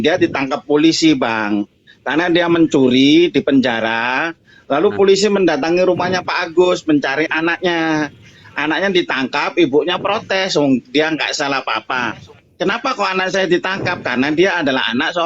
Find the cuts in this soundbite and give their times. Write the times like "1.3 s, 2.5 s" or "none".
none

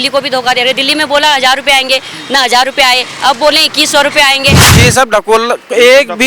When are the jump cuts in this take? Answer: 4.6 s

